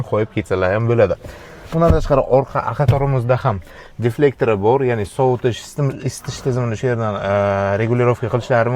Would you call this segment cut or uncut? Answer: uncut